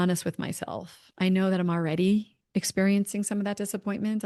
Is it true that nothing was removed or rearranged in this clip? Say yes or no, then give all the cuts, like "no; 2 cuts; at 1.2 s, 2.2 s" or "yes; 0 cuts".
yes; 0 cuts